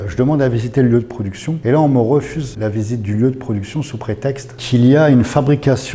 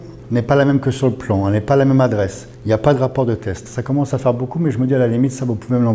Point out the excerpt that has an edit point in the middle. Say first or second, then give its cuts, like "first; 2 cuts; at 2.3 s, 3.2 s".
first; 3 cuts; at 1.5 s, 2.4 s, 4.5 s